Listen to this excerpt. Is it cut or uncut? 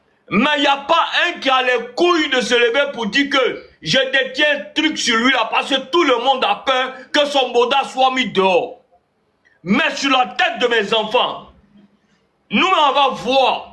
uncut